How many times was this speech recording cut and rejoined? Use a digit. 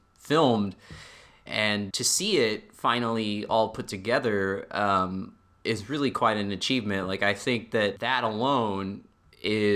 2